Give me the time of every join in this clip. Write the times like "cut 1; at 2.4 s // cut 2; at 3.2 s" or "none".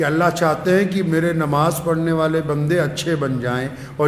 none